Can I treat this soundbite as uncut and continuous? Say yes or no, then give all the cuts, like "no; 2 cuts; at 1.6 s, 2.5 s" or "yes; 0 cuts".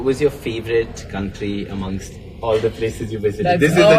yes; 0 cuts